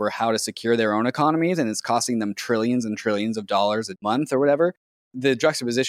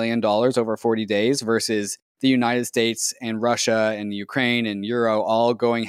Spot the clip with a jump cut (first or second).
first